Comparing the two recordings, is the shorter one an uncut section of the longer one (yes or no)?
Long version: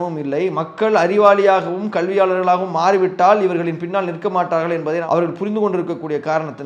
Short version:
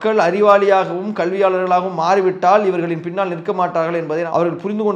yes